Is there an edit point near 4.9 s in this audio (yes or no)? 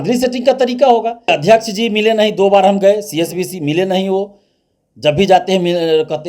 no